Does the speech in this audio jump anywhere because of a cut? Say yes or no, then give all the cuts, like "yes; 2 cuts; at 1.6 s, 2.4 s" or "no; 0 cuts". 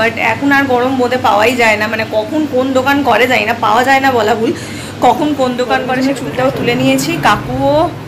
yes; 1 cut; at 5.9 s